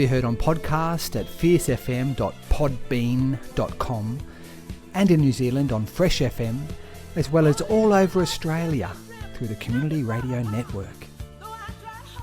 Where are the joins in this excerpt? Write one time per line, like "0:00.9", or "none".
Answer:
0:10.8